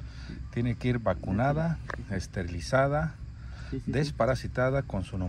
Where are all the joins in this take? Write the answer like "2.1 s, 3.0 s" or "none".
none